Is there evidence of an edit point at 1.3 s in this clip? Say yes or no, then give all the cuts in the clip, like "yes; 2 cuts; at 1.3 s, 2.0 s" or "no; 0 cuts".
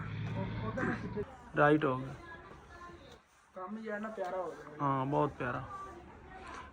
yes; 1 cut; at 1.3 s